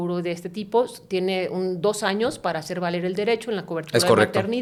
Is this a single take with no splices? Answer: yes; 0 cuts

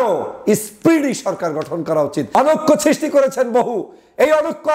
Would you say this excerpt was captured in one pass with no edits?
no; 1 cut; at 2.4 s

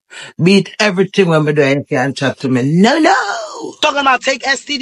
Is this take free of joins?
no; 1 cut; at 3.6 s

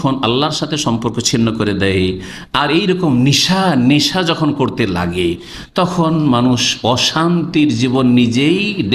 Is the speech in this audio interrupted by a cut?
no; 0 cuts

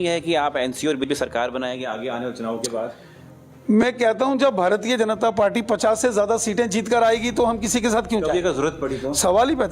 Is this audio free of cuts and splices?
no; 1 cut; at 1.1 s

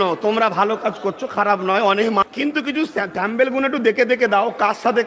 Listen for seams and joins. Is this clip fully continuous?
no; 1 cut; at 2.2 s

